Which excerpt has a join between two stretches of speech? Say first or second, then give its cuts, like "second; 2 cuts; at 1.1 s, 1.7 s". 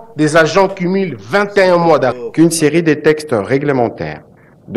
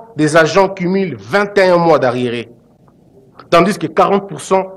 first; 1 cut; at 2.2 s